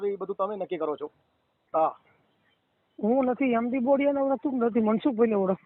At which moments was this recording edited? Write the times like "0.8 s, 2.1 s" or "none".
1.6 s